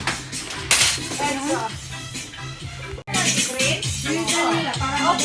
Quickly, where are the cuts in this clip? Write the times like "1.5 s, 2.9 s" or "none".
3.1 s